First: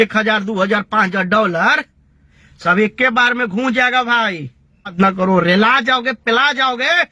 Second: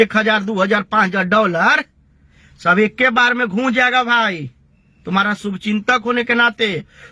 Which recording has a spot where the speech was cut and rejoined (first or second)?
first